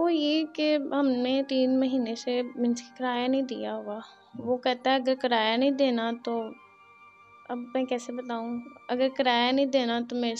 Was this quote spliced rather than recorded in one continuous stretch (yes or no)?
no